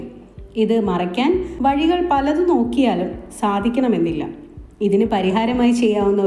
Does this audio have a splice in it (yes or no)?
yes